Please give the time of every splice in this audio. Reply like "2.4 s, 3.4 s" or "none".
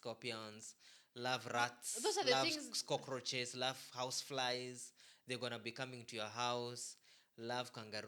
none